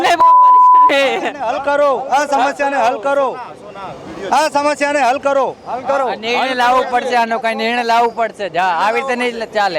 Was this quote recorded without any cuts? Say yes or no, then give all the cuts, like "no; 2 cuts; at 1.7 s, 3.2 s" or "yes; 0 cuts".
yes; 0 cuts